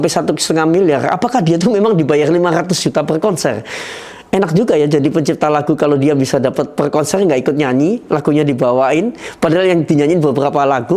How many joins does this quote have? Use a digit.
0